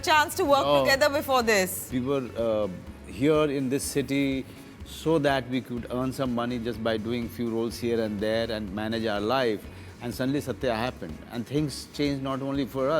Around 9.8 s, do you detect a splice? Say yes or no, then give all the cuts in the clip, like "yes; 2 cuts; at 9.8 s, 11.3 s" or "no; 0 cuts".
no; 1 cut; at 1.8 s